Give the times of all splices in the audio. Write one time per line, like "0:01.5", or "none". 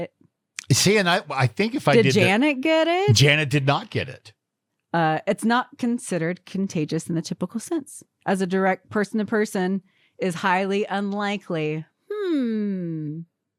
none